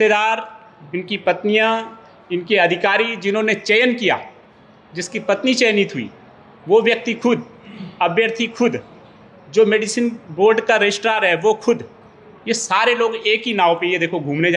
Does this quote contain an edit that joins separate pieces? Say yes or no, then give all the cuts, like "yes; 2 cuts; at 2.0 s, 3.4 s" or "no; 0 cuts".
no; 0 cuts